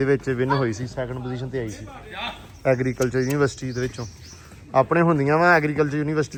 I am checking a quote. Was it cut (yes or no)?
no